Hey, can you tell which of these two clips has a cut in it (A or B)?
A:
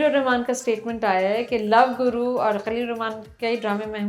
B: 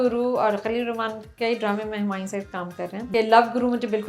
B